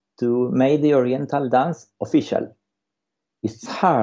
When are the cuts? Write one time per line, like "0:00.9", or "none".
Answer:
none